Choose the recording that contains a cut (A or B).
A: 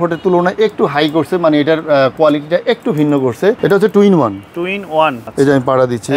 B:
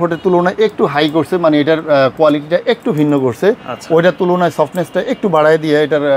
A